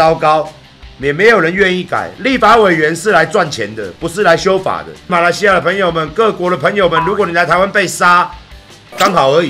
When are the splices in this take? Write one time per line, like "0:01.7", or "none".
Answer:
0:05.1

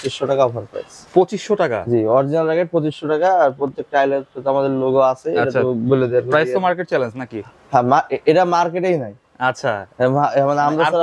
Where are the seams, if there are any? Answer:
none

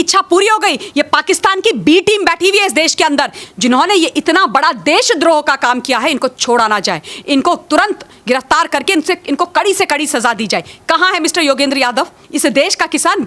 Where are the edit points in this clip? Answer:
0:03.4
0:12.2

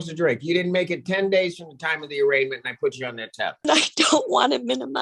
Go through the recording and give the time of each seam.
0:03.7

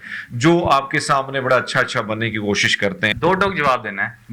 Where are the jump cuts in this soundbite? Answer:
0:03.1

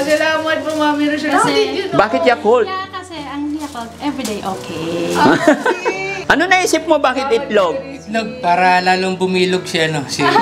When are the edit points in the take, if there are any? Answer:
0:06.1

